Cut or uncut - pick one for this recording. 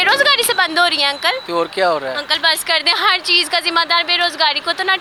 uncut